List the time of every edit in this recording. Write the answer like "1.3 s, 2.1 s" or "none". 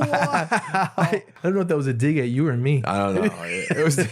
1.3 s